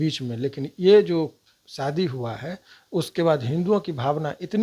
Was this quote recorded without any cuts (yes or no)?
yes